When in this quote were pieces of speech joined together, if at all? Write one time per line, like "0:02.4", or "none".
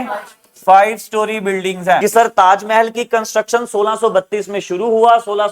0:02.0